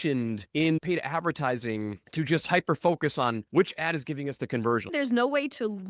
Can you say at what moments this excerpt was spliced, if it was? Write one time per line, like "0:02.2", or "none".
0:00.8
0:02.0
0:03.4
0:04.9